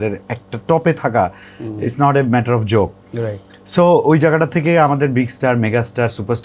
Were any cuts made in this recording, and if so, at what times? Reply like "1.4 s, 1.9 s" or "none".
none